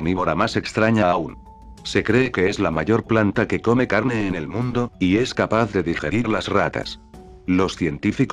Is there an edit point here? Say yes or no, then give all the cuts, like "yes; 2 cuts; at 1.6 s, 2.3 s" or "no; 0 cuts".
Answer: yes; 1 cut; at 1.4 s